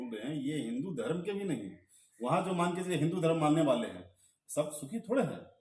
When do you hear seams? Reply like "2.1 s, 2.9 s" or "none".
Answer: none